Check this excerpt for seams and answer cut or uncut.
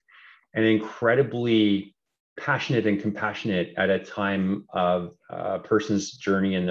uncut